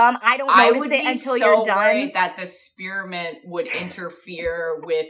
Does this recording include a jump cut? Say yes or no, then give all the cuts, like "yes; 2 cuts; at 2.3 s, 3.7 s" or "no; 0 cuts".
no; 0 cuts